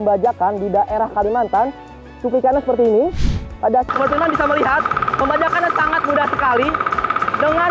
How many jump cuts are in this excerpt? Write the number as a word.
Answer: one